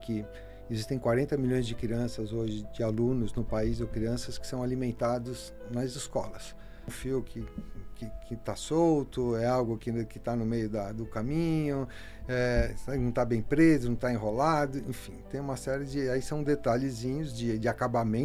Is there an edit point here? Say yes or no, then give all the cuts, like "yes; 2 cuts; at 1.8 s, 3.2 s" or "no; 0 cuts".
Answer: yes; 1 cut; at 6.9 s